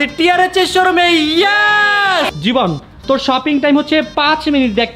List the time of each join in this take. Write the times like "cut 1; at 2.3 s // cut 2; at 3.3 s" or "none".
cut 1; at 2.3 s